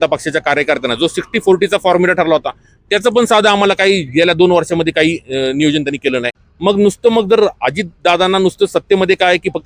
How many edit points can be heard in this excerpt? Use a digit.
1